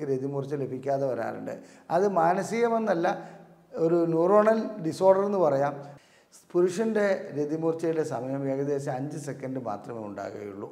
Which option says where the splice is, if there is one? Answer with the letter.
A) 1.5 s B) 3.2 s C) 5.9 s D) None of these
C